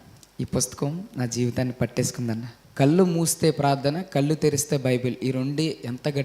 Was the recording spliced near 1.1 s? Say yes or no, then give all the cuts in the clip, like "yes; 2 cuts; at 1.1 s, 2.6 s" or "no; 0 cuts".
no; 1 cut; at 2.6 s